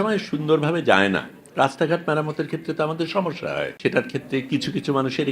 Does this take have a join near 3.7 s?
yes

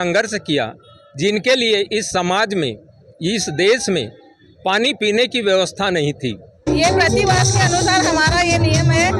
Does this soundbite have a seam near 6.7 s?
yes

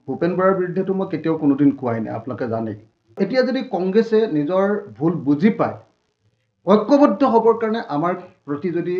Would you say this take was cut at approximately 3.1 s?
yes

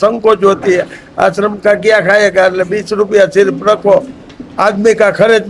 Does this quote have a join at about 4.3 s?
no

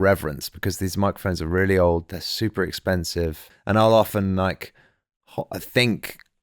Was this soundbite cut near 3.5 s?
yes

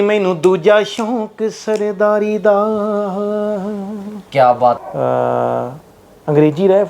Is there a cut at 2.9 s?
no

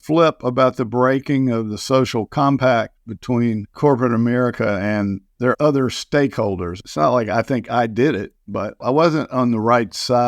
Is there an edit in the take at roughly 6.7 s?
yes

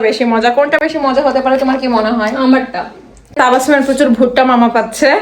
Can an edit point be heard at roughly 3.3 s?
yes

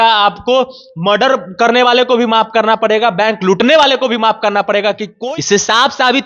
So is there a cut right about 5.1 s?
yes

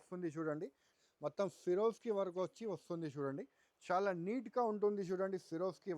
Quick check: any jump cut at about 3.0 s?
no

